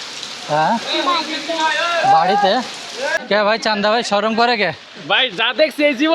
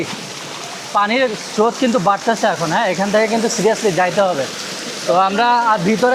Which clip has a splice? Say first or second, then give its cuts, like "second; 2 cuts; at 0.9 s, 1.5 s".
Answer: first; 1 cut; at 3.2 s